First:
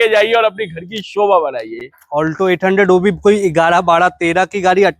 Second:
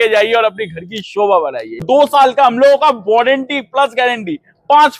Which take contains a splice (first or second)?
second